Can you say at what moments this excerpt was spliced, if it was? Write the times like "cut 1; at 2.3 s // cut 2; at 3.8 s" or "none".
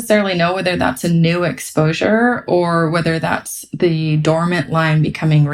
none